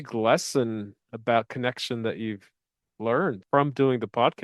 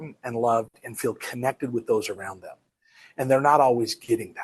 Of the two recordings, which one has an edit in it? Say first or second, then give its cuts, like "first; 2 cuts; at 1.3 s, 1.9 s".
first; 1 cut; at 3.4 s